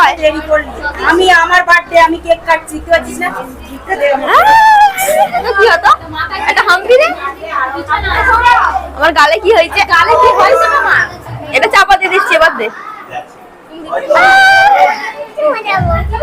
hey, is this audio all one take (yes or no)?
no